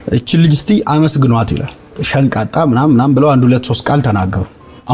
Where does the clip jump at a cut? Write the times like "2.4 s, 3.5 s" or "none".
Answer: 1.9 s